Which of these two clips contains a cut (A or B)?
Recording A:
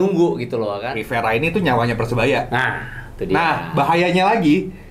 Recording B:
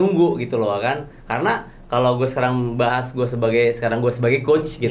A